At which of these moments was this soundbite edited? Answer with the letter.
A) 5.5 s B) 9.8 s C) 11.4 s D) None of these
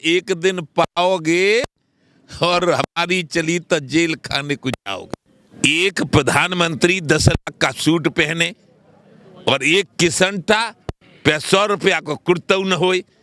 A